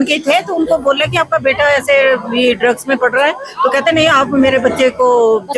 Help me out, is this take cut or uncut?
uncut